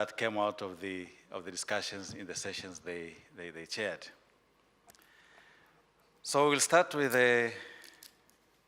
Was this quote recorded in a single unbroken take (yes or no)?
no